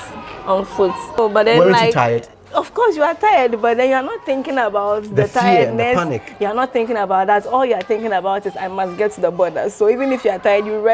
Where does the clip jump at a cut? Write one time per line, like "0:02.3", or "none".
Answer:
0:01.2